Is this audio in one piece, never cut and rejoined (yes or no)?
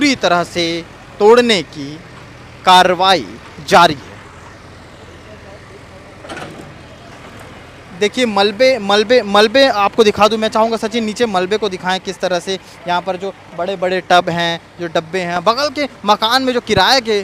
yes